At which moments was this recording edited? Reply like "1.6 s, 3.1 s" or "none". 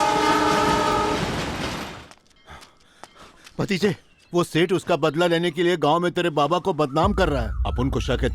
1.9 s